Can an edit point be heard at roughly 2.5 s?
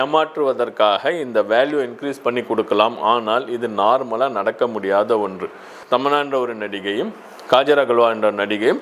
no; 1 cut; at 5.7 s

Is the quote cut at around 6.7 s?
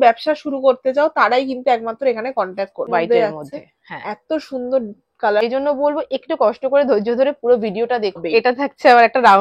no; 3 cuts; at 2.9 s, 5.4 s, 8.2 s

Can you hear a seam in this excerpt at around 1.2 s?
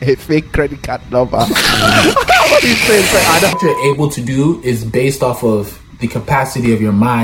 no; 1 cut; at 3.5 s

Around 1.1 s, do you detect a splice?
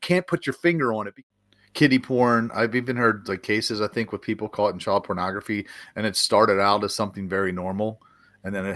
yes; 1 cut; at 1.1 s

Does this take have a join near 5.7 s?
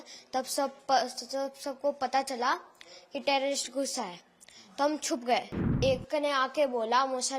yes; 1 cut; at 5.7 s

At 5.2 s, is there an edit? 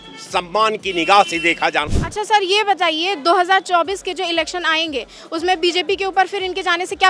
no; 1 cut; at 1.9 s

